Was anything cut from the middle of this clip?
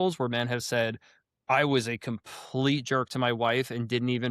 no; 0 cuts

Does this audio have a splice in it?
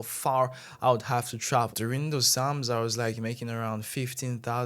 yes; 1 cut; at 1.7 s

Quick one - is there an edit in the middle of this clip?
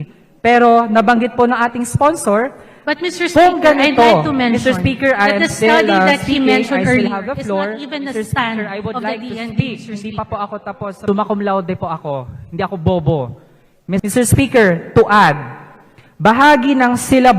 yes; 2 cuts; at 11.0 s, 14.0 s

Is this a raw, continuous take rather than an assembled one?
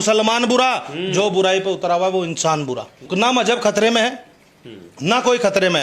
yes; 0 cuts

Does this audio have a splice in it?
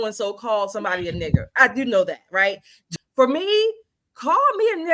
yes; 1 cut; at 2.7 s

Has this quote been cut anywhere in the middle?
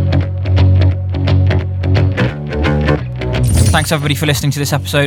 yes; 1 cut; at 3.7 s

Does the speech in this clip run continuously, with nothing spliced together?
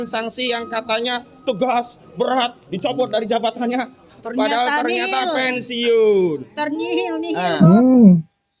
yes; 0 cuts

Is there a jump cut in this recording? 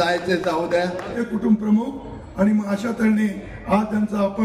yes; 1 cut; at 1.2 s

